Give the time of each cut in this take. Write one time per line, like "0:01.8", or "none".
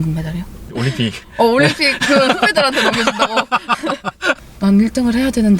0:04.3